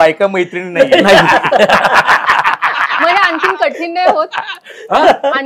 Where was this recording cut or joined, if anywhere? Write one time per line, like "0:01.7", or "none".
none